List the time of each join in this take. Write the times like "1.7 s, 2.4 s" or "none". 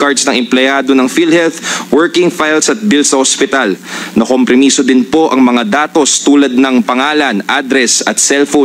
none